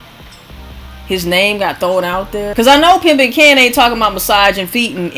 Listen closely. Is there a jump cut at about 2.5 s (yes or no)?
yes